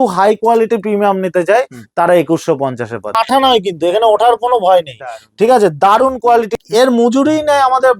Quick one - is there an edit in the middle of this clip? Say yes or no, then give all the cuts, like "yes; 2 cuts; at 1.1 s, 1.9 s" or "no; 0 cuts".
yes; 2 cuts; at 3.2 s, 6.5 s